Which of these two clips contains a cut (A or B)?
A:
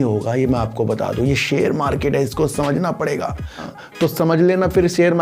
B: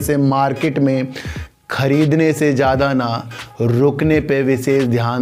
A